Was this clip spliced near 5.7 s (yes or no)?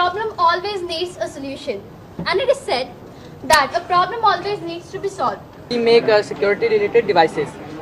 yes